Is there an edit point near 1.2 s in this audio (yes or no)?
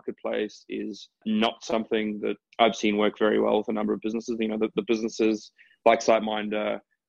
yes